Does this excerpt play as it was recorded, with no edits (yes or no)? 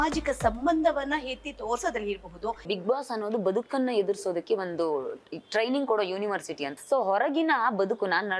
no